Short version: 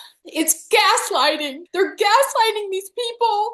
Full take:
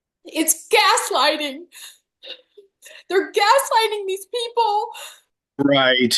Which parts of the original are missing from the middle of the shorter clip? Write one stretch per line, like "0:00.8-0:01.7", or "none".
0:01.6-0:02.9